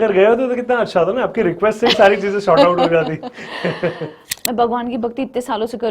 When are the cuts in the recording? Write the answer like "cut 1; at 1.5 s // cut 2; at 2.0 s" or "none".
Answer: cut 1; at 4.3 s